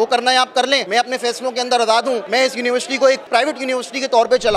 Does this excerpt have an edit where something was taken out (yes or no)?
yes